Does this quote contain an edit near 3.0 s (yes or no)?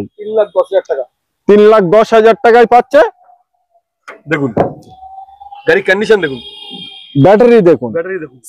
no